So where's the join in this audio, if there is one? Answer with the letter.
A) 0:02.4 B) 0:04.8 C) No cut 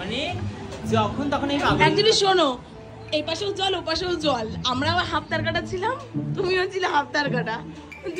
C